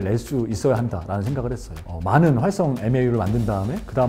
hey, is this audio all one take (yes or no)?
yes